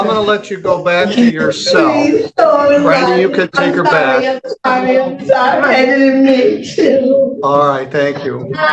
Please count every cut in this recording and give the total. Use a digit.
0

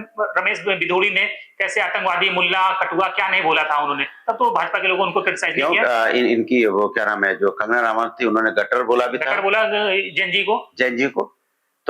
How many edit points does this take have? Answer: 0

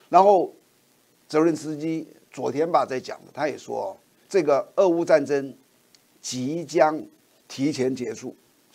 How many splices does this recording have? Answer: 1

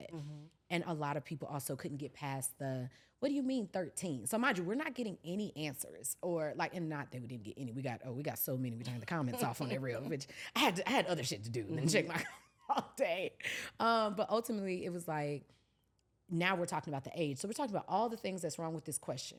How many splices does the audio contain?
0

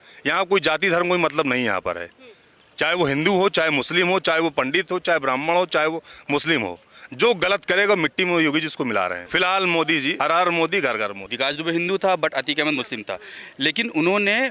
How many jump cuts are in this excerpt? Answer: 3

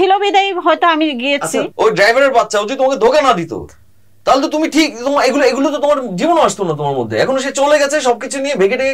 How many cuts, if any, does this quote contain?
1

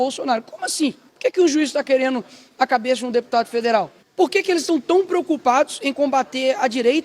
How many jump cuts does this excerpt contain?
2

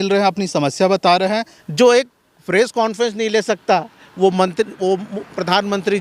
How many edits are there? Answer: 1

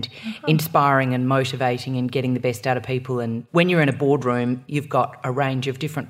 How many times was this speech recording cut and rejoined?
2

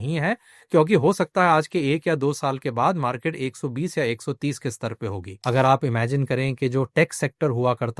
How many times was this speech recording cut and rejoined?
1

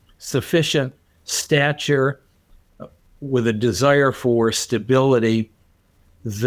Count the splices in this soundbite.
0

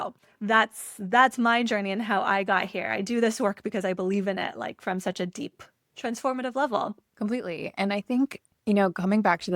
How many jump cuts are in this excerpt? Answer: 2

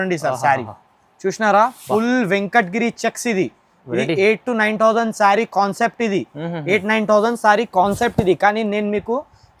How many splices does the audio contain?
0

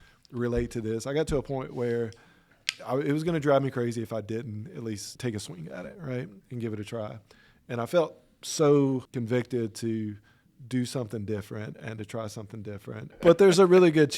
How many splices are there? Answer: 3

